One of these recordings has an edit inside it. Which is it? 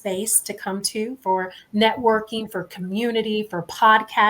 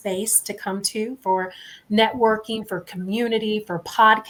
first; 1 cut; at 1.6 s

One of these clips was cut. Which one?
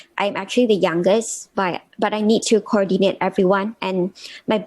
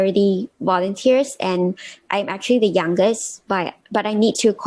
first; 1 cut; at 3.7 s

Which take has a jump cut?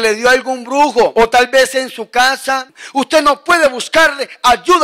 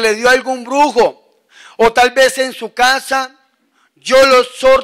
first; 2 cuts; at 1.1 s, 2.8 s

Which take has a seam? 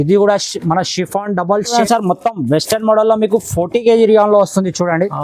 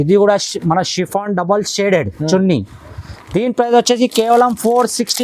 first; 1 cut; at 1.8 s

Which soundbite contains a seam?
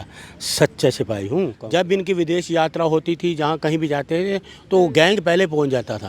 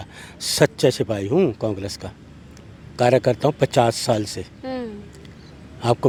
first; 1 cut; at 1.6 s

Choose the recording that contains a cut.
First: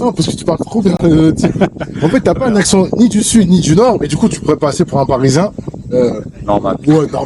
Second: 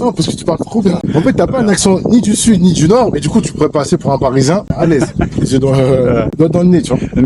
second; 3 cuts; at 1.0 s, 4.7 s, 6.3 s

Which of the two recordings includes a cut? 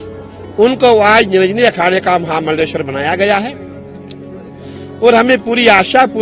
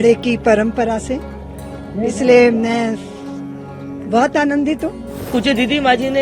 second; 1 cut; at 5.3 s

